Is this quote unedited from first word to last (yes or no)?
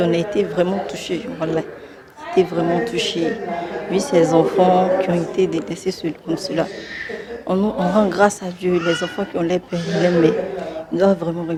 yes